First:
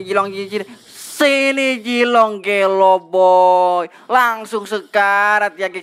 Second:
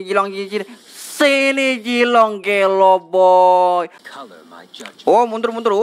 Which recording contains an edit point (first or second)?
second